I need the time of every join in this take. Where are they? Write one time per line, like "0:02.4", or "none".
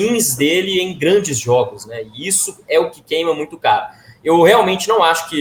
none